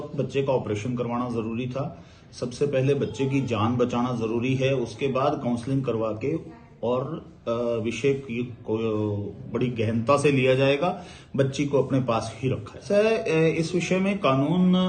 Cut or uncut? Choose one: cut